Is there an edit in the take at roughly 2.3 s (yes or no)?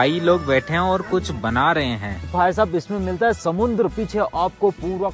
yes